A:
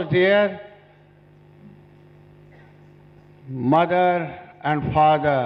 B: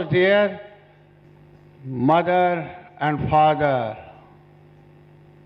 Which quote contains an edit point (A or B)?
B